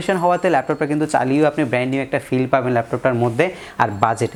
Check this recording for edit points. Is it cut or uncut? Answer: uncut